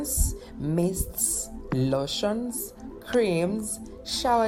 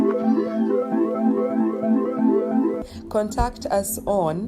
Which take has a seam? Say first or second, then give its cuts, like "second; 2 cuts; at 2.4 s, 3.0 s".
second; 1 cut; at 2.8 s